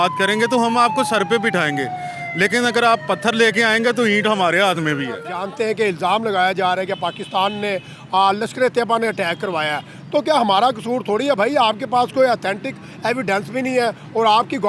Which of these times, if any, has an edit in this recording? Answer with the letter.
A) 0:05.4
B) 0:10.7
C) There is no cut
A